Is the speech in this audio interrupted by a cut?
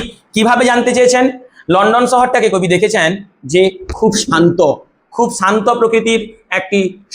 no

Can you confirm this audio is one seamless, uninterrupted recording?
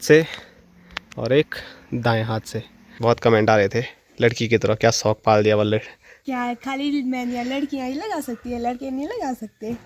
no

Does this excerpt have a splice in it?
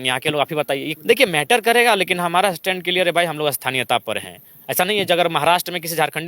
yes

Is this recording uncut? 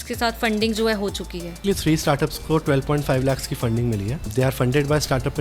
no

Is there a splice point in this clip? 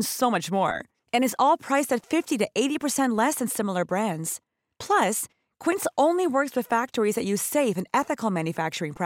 no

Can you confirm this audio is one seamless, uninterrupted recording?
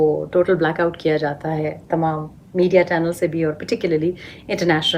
yes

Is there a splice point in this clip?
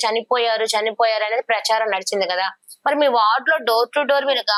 no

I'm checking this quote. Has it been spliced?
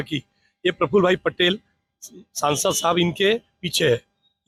no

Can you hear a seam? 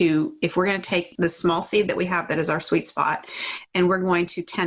yes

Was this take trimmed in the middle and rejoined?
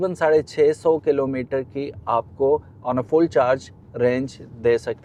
no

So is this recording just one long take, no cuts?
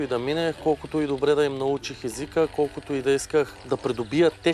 no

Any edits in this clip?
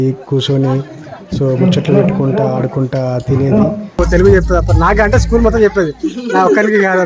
yes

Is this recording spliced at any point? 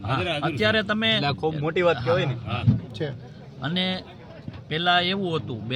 no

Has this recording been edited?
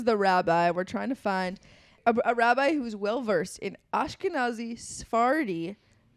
yes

